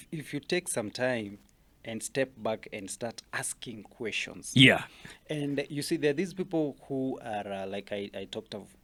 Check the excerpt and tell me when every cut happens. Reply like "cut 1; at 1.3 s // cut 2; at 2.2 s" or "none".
none